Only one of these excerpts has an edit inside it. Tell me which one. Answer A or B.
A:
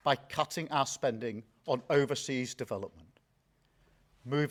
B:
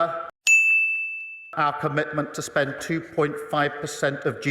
B